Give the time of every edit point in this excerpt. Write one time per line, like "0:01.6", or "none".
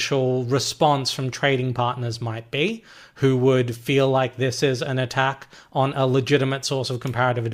none